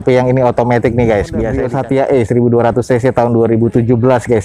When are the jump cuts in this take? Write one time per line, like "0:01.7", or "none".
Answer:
0:01.6

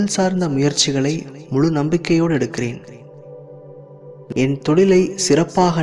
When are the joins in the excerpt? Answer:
0:02.9
0:04.3

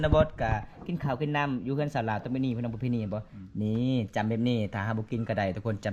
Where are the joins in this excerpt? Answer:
none

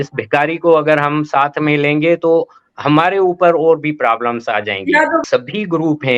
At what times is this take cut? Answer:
0:05.2

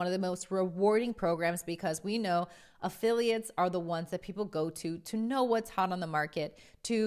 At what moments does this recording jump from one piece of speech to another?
none

